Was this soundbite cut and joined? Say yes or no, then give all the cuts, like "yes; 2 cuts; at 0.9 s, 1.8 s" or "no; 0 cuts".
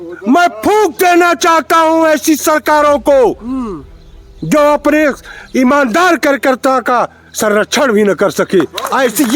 no; 0 cuts